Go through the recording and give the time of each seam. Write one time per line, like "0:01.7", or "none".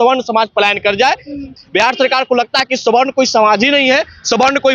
0:01.6